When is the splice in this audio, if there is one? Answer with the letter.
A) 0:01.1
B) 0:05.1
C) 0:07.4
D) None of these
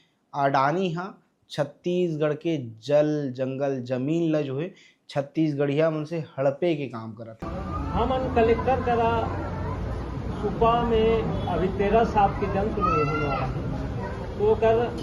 C